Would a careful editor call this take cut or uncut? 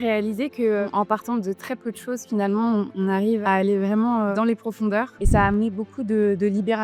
cut